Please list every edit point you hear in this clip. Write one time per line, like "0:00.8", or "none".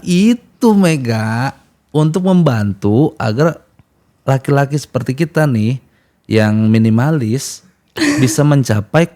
none

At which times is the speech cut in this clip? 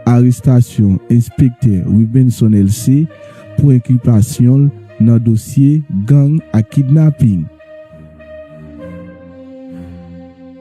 none

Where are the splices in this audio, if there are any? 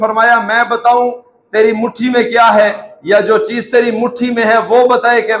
none

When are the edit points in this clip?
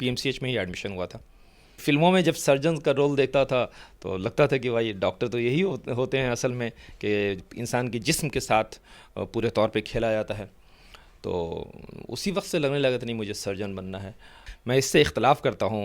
0:01.8
0:14.5

